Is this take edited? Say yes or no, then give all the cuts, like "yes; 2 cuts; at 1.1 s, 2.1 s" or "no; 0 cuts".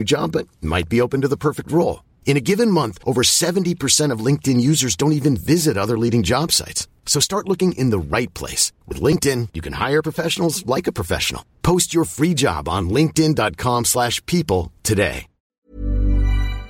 yes; 1 cut; at 15.6 s